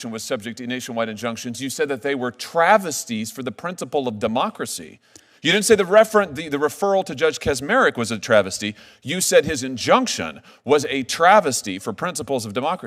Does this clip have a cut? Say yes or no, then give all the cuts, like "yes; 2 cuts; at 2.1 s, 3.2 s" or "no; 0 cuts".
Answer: no; 0 cuts